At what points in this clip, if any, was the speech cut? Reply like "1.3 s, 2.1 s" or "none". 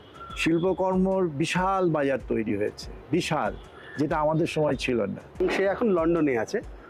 5.4 s